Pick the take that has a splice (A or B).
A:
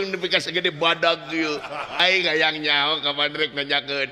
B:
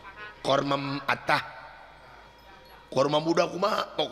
A